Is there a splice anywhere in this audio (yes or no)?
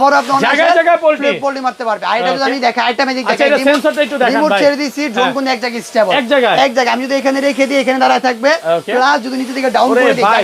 no